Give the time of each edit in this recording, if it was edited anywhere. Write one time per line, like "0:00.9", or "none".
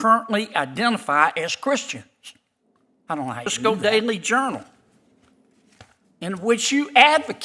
0:03.5